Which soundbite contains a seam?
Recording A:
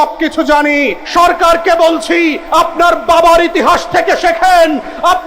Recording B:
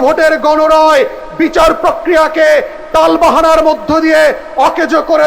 A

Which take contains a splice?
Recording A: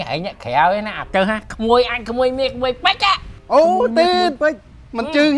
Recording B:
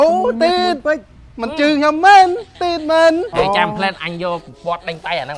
B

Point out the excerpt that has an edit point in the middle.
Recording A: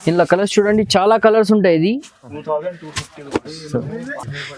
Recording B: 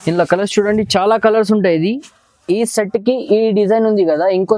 A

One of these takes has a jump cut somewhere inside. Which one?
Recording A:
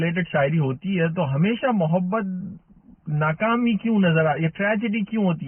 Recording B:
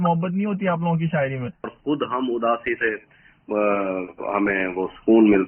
B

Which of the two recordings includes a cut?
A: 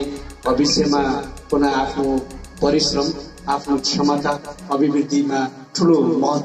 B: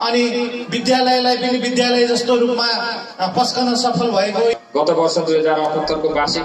B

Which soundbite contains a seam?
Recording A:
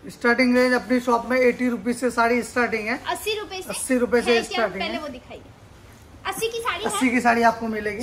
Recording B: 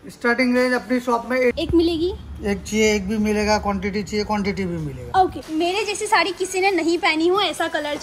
B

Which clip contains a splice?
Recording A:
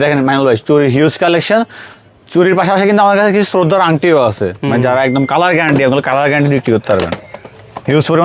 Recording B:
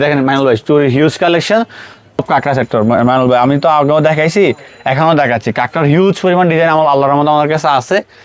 B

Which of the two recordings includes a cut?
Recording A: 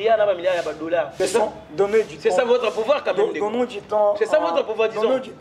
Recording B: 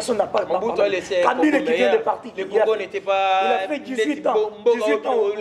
A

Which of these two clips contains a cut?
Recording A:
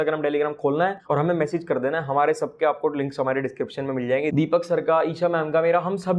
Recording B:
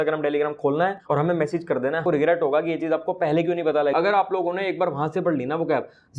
B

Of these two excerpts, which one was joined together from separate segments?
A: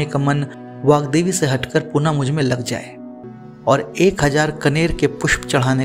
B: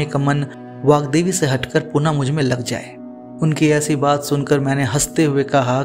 A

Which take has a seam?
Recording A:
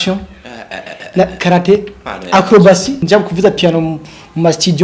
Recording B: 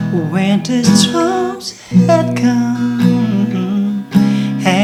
A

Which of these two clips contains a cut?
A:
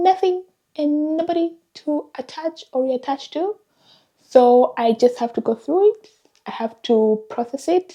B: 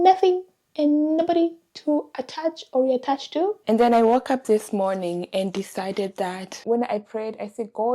B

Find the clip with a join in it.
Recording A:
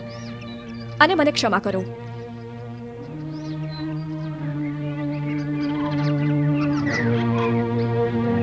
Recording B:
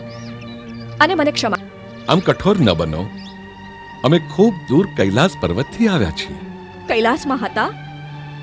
B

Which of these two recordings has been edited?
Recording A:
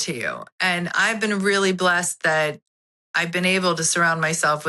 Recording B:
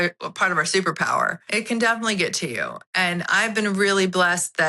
B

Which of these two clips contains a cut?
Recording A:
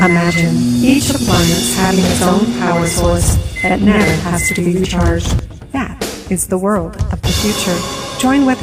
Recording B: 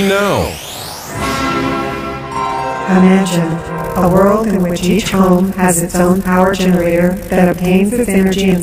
A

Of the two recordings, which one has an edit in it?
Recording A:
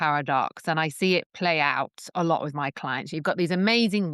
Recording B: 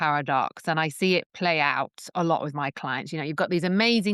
A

